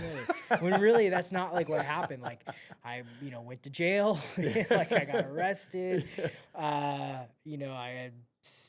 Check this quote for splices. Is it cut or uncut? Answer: uncut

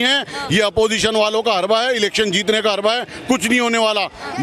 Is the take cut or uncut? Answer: uncut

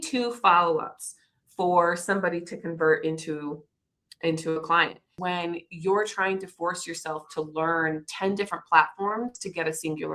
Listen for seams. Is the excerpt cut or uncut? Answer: cut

